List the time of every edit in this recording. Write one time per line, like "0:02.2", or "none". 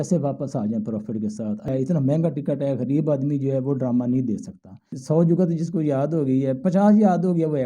0:01.7
0:04.9